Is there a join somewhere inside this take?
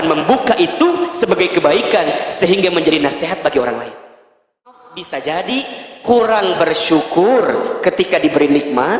yes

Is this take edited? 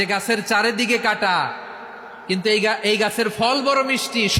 no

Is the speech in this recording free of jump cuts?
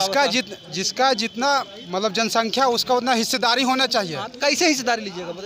yes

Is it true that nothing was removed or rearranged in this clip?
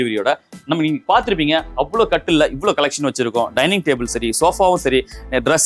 yes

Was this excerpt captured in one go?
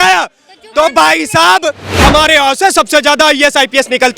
no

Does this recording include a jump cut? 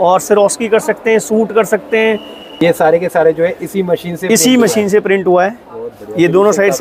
yes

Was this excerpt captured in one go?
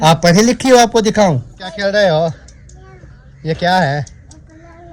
no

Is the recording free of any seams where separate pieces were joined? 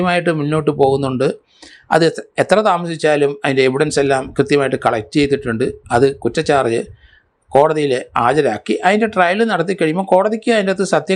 yes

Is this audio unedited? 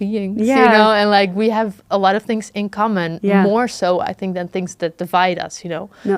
yes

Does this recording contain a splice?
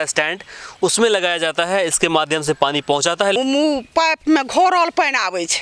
yes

